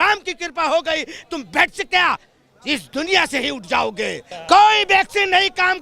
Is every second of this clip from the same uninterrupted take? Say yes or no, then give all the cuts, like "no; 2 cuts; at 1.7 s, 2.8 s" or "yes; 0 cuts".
no; 1 cut; at 4.3 s